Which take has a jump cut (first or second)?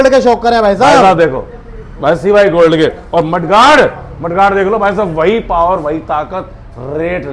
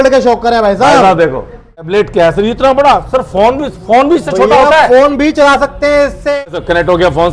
second